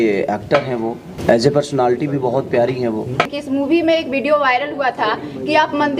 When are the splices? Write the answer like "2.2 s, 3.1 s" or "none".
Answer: 1.1 s, 3.4 s